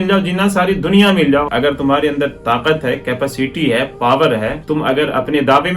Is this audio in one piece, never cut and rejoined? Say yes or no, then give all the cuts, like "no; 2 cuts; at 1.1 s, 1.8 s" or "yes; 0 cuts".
no; 2 cuts; at 1.5 s, 4.6 s